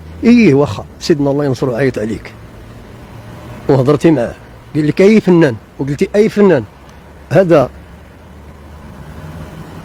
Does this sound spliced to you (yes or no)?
no